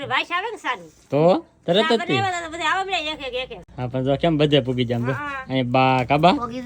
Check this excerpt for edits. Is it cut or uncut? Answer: uncut